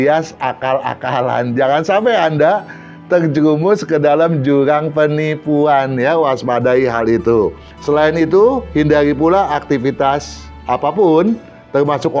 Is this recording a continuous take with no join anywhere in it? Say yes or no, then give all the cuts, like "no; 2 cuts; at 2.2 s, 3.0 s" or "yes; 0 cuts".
no; 1 cut; at 7.7 s